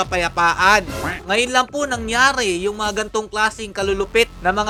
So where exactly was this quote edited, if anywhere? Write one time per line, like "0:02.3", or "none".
none